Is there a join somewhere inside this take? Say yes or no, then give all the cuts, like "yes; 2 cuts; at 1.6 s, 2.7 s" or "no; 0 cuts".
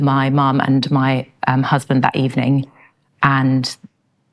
no; 0 cuts